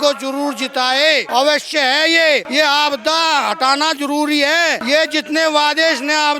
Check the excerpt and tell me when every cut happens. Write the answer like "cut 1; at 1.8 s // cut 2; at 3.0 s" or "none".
cut 1; at 1.3 s // cut 2; at 2.5 s // cut 3; at 4.8 s